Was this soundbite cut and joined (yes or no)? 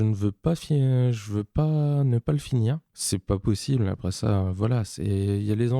yes